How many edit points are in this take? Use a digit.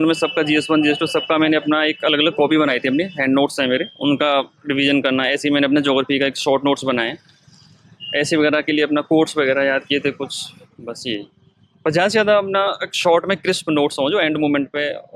0